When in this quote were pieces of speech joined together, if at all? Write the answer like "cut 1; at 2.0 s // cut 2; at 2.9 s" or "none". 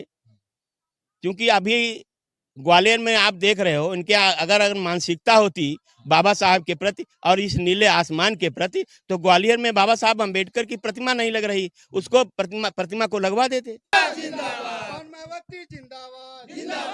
cut 1; at 13.9 s